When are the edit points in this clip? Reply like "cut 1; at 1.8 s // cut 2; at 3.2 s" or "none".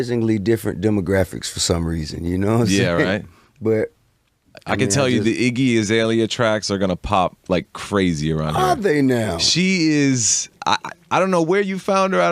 cut 1; at 10.2 s

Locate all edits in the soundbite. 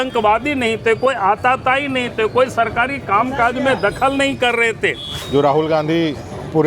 cut 1; at 5.1 s

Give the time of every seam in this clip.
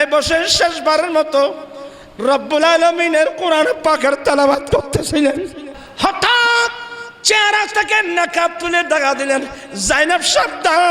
cut 1; at 5.8 s

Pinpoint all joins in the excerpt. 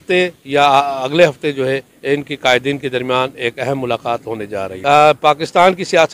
cut 1; at 4.7 s

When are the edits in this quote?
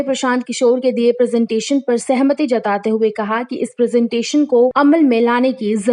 cut 1; at 4.7 s

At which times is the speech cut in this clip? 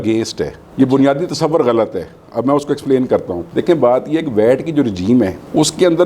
none

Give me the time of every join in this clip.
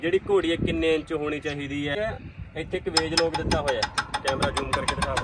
cut 1; at 2.0 s

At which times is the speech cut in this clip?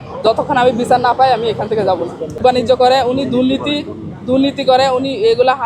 cut 1; at 2.4 s

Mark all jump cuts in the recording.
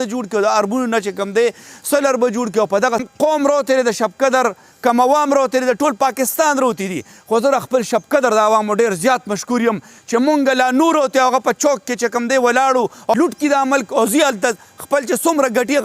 cut 1; at 3.1 s // cut 2; at 13.1 s

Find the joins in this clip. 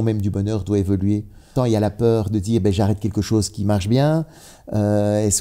cut 1; at 1.5 s

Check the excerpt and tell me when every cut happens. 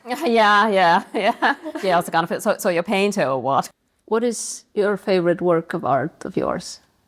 cut 1; at 3.7 s

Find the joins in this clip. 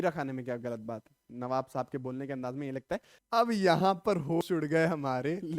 cut 1; at 1.2 s // cut 2; at 3.1 s

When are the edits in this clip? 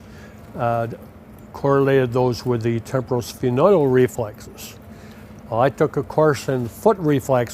cut 1; at 2.0 s

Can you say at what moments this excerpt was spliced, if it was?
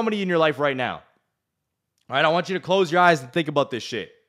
none

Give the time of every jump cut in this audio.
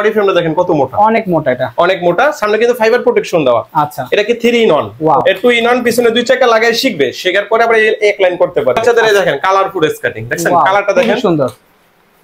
cut 1; at 4.9 s // cut 2; at 8.8 s

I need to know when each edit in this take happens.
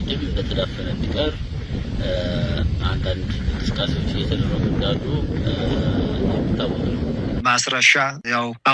cut 1; at 7.4 s

